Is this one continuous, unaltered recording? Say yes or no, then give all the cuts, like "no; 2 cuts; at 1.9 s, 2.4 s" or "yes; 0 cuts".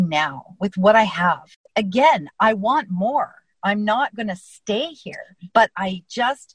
no; 1 cut; at 1.6 s